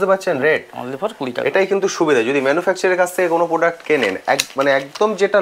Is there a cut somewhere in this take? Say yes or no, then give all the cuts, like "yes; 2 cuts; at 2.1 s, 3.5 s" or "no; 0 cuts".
no; 0 cuts